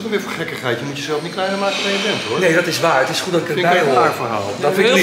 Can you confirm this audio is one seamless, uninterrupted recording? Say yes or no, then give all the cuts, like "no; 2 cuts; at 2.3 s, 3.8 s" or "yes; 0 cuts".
yes; 0 cuts